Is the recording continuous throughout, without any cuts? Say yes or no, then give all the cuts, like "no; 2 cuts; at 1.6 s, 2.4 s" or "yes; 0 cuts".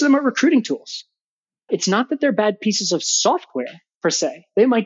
no; 1 cut; at 1.6 s